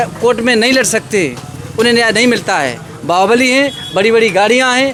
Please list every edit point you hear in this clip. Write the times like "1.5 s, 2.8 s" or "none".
none